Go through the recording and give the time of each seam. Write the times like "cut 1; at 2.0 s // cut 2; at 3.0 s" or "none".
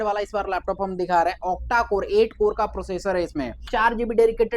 cut 1; at 3.6 s